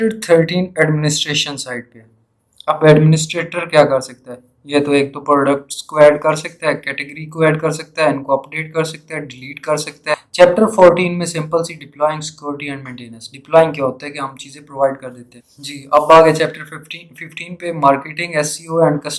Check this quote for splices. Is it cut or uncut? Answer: cut